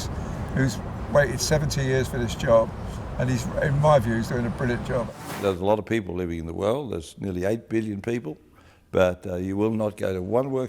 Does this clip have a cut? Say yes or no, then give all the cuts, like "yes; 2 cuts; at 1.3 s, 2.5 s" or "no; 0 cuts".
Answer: yes; 1 cut; at 5.1 s